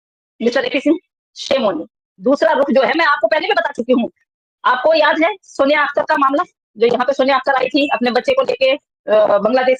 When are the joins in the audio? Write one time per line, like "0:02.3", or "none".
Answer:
none